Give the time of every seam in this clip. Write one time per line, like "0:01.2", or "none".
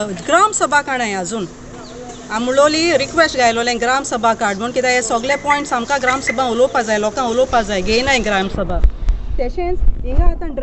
none